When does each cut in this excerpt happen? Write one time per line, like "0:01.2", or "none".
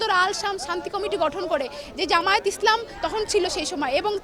none